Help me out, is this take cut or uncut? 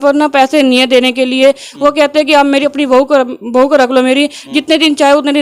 uncut